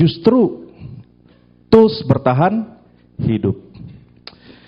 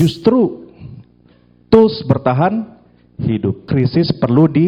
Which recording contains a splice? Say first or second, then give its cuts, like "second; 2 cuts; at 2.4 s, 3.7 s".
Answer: second; 1 cut; at 3.7 s